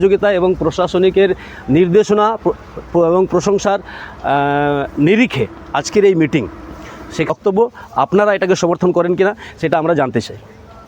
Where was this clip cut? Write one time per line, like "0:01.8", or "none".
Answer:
0:07.3